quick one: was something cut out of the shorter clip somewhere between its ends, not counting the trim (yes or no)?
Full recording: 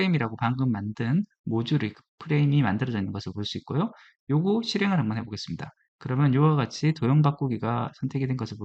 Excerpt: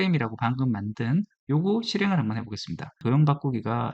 yes